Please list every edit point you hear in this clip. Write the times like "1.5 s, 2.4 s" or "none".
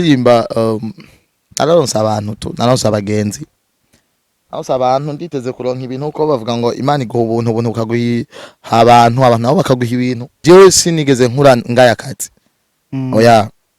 10.3 s